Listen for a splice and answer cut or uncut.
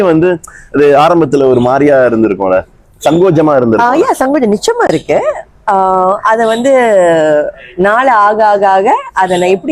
uncut